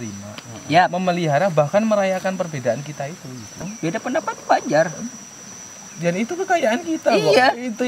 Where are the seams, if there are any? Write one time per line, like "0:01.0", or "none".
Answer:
0:03.5